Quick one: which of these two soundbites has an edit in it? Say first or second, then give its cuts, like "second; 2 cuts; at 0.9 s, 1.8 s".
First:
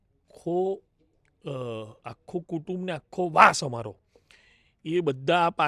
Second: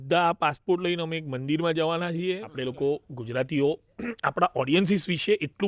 second; 1 cut; at 2.5 s